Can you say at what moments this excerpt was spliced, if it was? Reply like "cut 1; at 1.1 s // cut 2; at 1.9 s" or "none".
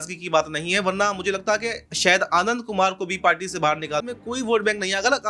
cut 1; at 4.1 s